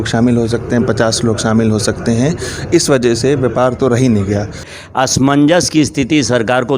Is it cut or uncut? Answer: cut